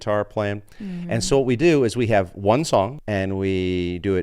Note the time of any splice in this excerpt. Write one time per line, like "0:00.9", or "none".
0:03.0